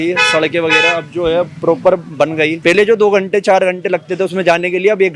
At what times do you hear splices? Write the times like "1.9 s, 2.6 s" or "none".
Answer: 2.6 s